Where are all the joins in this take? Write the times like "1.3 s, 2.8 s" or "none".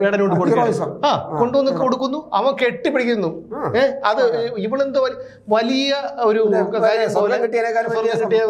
none